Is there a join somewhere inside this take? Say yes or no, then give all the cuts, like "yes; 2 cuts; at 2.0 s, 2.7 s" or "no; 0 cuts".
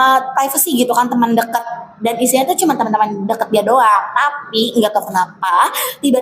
no; 0 cuts